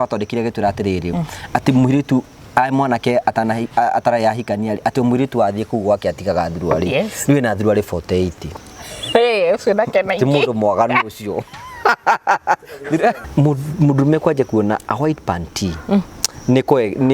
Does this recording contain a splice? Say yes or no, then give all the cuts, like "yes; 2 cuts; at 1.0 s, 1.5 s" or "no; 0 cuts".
yes; 1 cut; at 13.2 s